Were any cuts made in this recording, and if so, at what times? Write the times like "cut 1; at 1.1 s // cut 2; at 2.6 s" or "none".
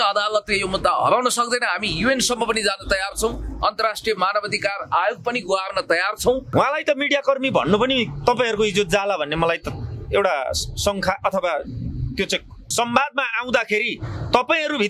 cut 1; at 6.4 s // cut 2; at 12.6 s